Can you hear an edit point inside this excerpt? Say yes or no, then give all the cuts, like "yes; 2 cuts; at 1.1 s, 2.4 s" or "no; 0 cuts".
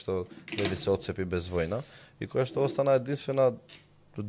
no; 0 cuts